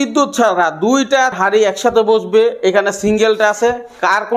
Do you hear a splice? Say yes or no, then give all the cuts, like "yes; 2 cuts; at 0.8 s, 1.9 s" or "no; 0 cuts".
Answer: yes; 1 cut; at 1.4 s